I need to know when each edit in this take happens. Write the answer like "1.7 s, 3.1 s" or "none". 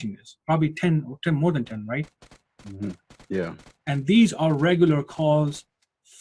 none